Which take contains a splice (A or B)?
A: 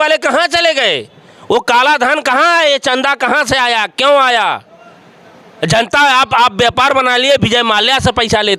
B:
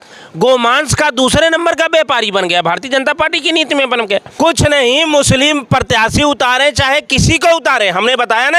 B